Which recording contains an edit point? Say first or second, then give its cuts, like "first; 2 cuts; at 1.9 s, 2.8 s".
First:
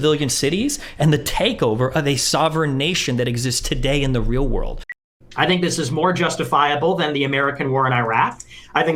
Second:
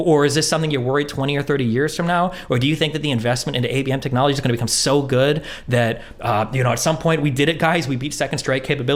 first; 1 cut; at 4.8 s